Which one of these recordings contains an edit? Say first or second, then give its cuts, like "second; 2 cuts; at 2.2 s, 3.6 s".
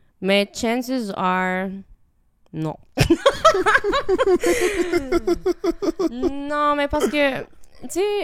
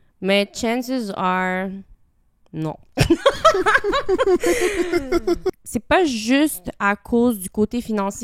second; 1 cut; at 5.5 s